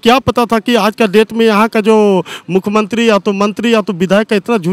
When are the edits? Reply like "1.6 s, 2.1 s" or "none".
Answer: none

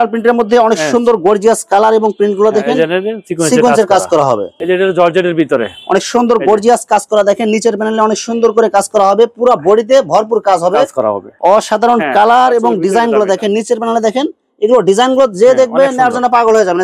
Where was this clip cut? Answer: 4.5 s, 11.3 s

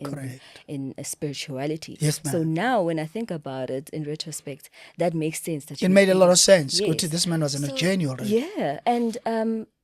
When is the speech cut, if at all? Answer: none

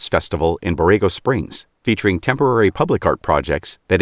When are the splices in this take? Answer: none

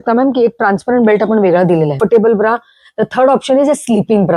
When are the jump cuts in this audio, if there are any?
2.0 s

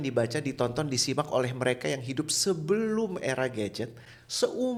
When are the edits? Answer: none

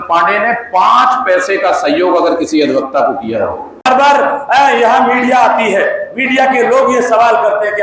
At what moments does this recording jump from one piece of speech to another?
3.8 s

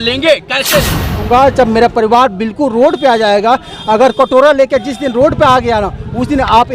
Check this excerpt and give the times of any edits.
1.2 s

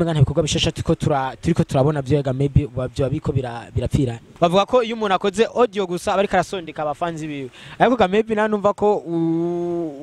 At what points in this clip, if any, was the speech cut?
4.3 s

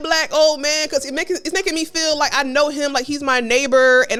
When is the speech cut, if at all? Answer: none

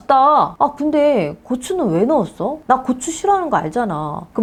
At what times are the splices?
none

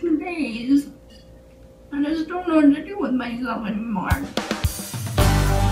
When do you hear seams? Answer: 4.3 s

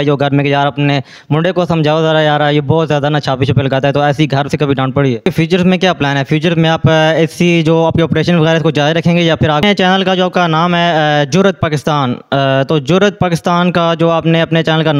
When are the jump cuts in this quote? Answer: 5.2 s, 9.6 s

